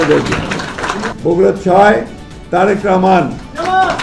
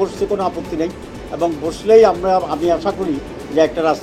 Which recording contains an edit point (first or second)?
first